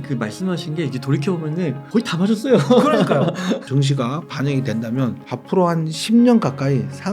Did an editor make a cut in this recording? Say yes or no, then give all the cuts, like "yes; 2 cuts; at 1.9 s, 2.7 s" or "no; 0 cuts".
yes; 3 cuts; at 1.8 s, 3.6 s, 5.3 s